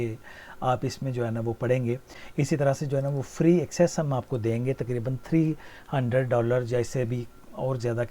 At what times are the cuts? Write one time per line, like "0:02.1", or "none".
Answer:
0:02.2